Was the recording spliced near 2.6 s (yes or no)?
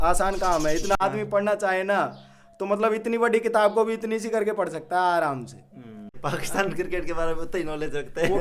no